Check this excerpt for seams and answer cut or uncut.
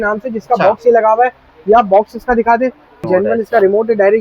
cut